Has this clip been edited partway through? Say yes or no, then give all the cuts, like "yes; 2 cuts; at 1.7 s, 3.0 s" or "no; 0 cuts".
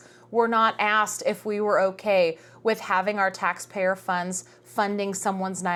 no; 0 cuts